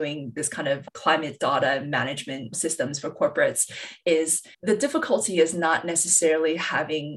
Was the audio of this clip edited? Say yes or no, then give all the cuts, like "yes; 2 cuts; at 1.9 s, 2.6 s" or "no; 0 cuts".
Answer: no; 0 cuts